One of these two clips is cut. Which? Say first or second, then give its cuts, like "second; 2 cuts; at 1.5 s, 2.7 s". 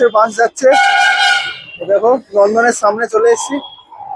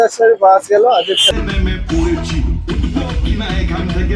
second; 1 cut; at 1.3 s